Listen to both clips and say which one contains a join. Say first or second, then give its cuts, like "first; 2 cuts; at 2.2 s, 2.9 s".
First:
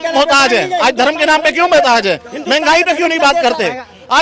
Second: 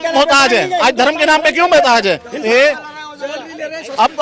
second; 1 cut; at 2.4 s